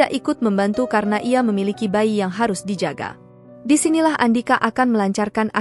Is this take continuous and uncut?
yes; 0 cuts

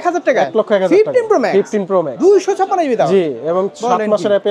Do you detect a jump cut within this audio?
no; 0 cuts

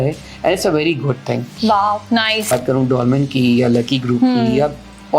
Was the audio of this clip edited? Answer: yes; 1 cut; at 2.5 s

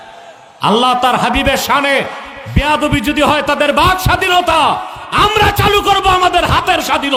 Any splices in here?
no; 0 cuts

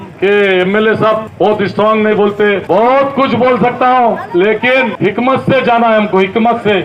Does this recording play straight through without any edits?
yes; 0 cuts

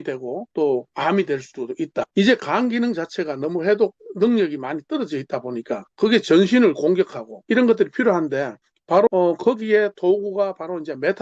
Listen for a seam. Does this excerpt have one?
yes; 4 cuts; at 2.1 s, 5.8 s, 7.3 s, 9.1 s

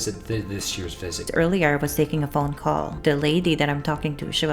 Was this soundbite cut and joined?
yes; 2 cuts; at 1.3 s, 2.9 s

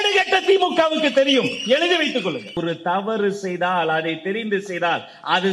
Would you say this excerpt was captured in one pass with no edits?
no; 1 cut; at 2.6 s

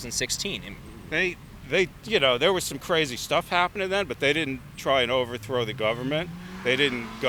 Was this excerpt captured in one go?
yes; 0 cuts

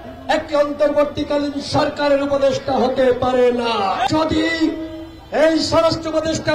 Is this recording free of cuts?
no; 1 cut; at 4.1 s

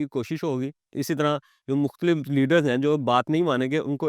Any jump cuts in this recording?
no; 0 cuts

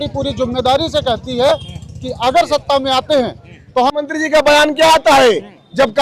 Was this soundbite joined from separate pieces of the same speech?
yes; 1 cut; at 4.0 s

